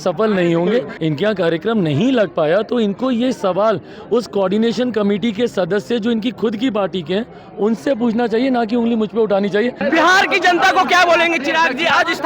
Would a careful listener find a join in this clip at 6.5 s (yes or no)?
no